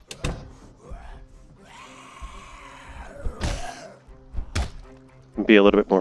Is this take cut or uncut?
uncut